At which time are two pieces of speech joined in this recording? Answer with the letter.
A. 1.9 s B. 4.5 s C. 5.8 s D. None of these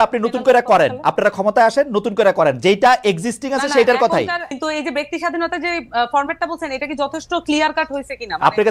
B